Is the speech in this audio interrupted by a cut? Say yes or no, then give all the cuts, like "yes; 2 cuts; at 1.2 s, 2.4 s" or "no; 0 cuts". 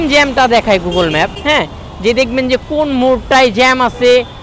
yes; 1 cut; at 1.4 s